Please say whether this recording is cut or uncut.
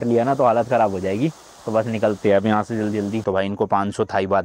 cut